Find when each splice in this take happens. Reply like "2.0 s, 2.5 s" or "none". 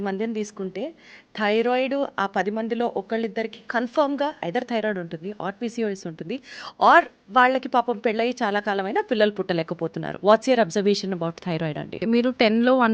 10.2 s, 12.0 s